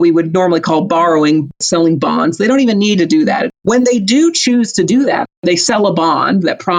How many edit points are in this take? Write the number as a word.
three